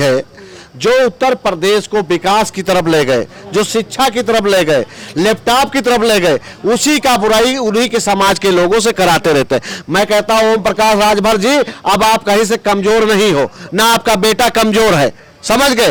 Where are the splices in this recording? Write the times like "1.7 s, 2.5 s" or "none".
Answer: none